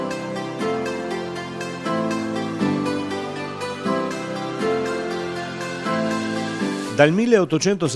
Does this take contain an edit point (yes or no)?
yes